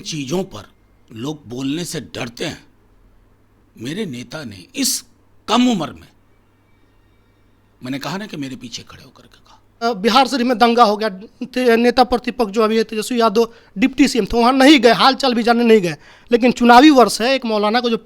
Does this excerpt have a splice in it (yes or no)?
yes